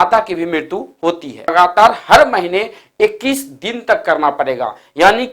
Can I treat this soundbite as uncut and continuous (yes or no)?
no